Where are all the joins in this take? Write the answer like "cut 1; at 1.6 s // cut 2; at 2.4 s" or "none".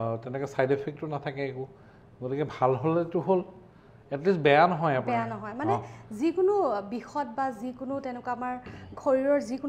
none

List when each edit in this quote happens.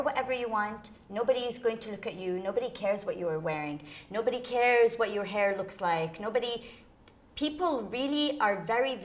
none

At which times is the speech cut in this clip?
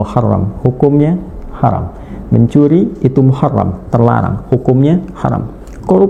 none

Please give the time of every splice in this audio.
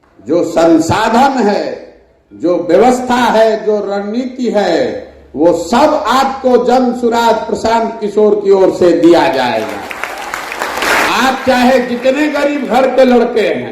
cut 1; at 11.0 s

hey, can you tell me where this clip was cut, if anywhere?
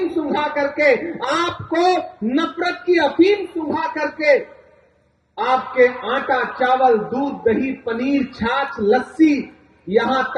none

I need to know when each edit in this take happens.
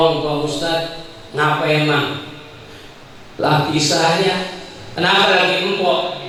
none

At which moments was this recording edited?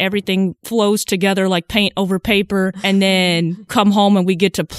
cut 1; at 2.8 s // cut 2; at 3.7 s

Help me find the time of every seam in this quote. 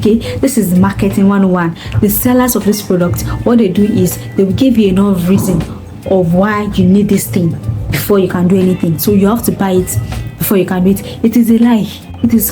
none

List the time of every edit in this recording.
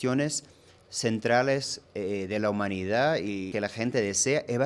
cut 1; at 3.5 s

